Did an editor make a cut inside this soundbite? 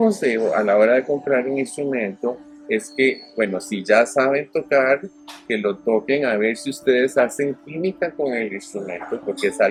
no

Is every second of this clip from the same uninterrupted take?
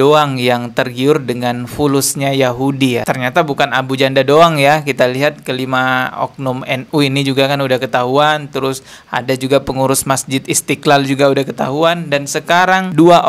yes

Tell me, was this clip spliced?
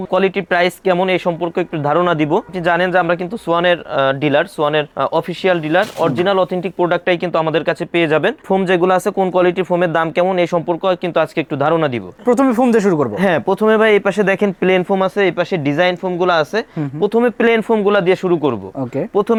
no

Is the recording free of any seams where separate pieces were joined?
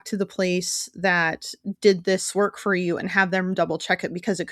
yes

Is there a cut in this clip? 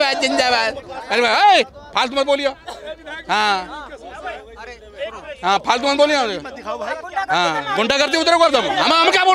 no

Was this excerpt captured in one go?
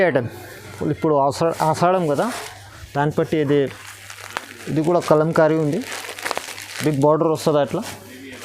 no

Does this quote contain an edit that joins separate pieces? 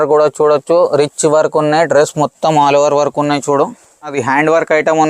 yes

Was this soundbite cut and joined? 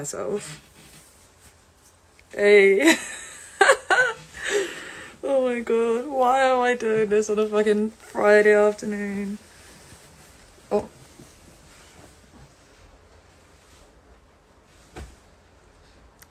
no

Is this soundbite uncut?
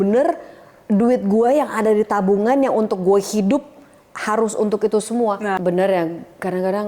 no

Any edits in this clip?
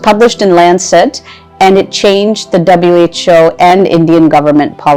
no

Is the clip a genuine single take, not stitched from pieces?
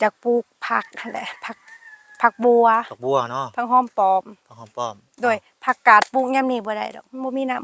yes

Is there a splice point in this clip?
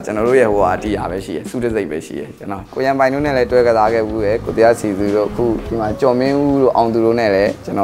yes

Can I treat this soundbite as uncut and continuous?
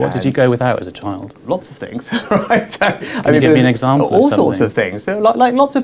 no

